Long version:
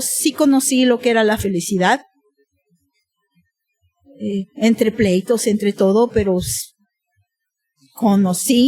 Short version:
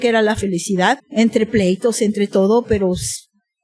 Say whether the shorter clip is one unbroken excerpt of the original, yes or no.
no